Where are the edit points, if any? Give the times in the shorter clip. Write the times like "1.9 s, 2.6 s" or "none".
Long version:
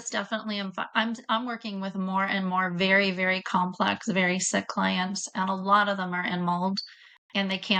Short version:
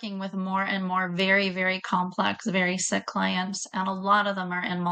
none